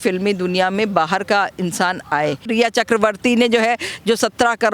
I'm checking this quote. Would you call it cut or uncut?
cut